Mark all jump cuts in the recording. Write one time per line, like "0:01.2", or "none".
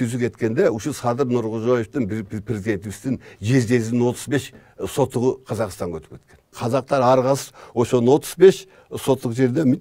0:06.6